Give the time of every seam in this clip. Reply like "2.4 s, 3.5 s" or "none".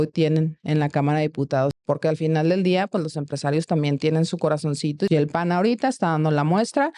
1.8 s, 5.1 s